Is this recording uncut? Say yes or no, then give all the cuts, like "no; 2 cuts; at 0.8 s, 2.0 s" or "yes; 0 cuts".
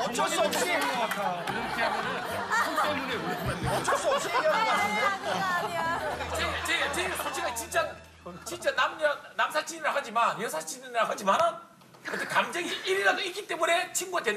no; 1 cut; at 6.3 s